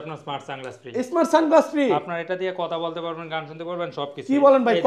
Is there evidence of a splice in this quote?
no; 0 cuts

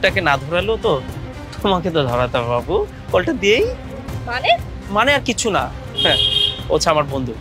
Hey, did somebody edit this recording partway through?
no; 0 cuts

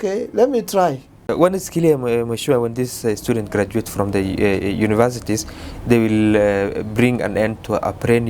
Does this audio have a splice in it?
yes; 1 cut; at 1.3 s

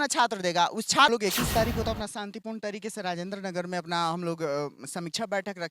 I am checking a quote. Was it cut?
yes; 1 cut; at 1.1 s

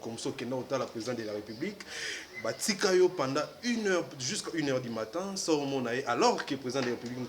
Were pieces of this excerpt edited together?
no; 0 cuts

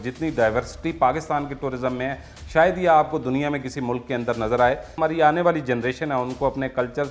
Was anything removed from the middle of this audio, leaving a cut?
yes; 1 cut; at 5.0 s

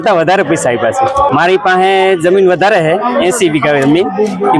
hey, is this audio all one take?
no; 1 cut; at 1.3 s

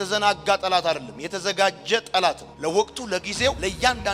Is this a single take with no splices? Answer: yes; 0 cuts

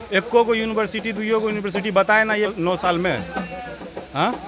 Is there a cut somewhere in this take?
yes; 1 cut; at 2.5 s

